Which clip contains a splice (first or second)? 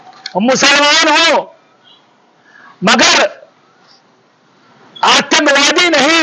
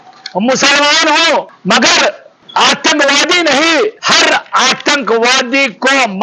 second